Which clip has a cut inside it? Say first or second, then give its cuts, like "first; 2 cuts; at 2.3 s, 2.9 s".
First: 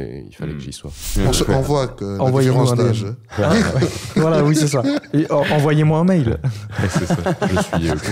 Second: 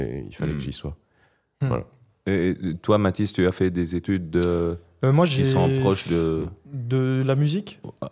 first; 1 cut; at 1.0 s